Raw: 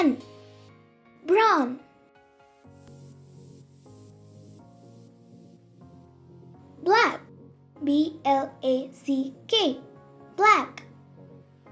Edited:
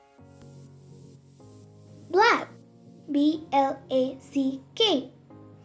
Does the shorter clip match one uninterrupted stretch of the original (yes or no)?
no